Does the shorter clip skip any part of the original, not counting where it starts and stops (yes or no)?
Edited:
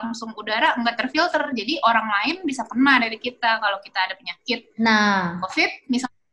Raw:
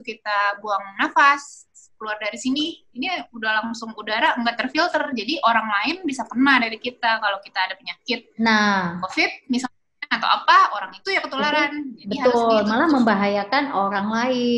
no